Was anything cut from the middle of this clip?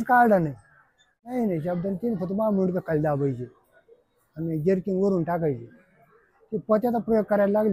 yes; 1 cut; at 1.3 s

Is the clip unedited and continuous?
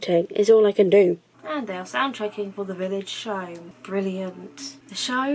no; 2 cuts; at 1.3 s, 3.7 s

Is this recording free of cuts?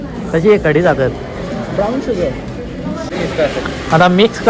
no; 1 cut; at 3.1 s

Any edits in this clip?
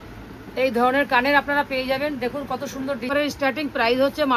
yes; 1 cut; at 3.1 s

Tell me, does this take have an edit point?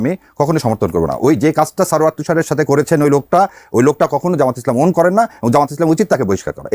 no; 0 cuts

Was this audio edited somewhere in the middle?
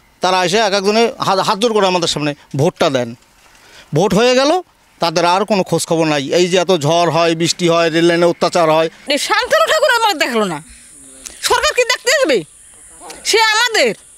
yes; 1 cut; at 9.0 s

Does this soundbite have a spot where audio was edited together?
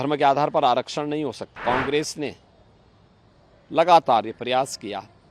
yes; 1 cut; at 1.5 s

